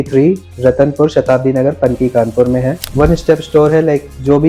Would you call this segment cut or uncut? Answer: cut